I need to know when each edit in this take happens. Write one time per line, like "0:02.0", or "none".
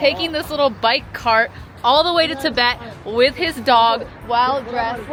none